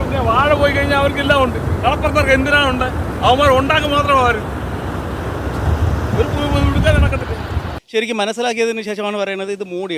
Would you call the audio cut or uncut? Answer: cut